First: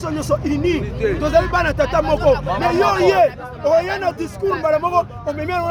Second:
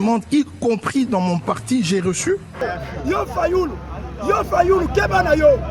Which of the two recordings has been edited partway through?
second; 1 cut; at 2.6 s

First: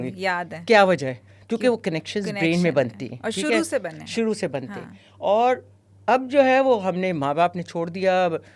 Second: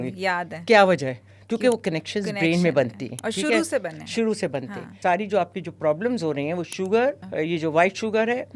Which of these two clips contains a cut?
second; 2 cuts; at 4.9 s, 7.2 s

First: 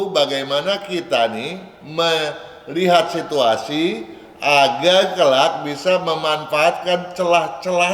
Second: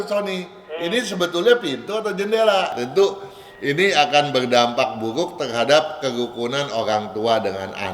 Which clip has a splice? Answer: second; 1 cut; at 2.7 s

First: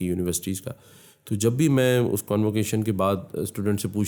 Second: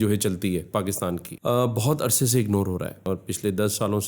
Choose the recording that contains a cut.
second; 2 cuts; at 1.3 s, 3.0 s

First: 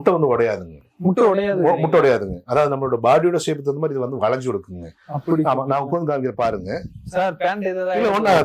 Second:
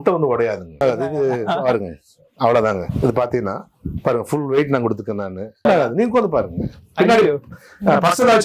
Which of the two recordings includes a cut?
second; 2 cuts; at 0.8 s, 5.6 s

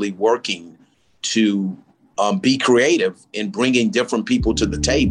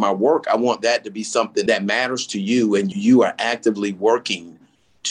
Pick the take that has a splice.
second; 2 cuts; at 1.6 s, 2.9 s

